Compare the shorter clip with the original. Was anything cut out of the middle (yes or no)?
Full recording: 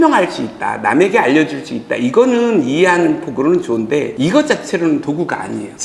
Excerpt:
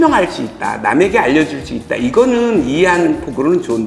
no